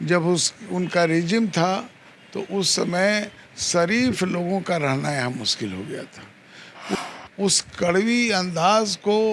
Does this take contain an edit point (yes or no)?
yes